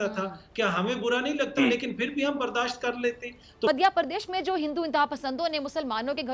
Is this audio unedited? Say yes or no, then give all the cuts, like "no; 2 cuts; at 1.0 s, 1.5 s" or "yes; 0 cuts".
no; 1 cut; at 3.7 s